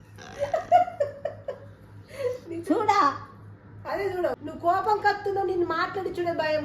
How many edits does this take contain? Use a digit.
1